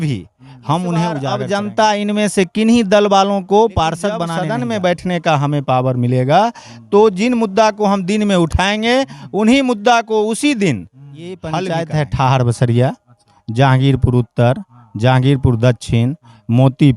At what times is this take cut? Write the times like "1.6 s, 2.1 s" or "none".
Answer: 1.2 s, 4.3 s, 11.6 s